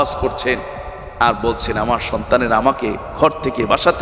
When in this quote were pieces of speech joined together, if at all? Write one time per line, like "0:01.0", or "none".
none